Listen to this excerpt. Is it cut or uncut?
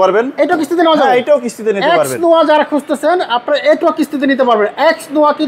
uncut